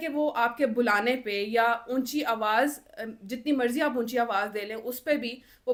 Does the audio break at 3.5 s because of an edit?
no; 0 cuts

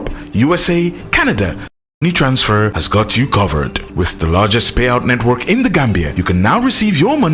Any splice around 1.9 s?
yes; 1 cut; at 1.9 s

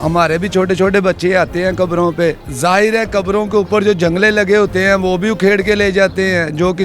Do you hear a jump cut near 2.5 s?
yes; 1 cut; at 2.5 s

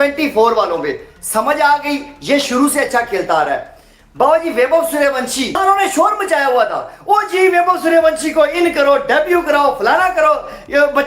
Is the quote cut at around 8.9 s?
no; 1 cut; at 5.6 s

